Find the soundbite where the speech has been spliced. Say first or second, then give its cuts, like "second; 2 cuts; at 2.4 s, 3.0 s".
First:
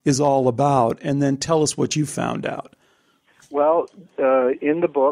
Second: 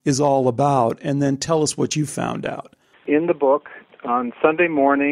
second; 2 cuts; at 3.0 s, 3.8 s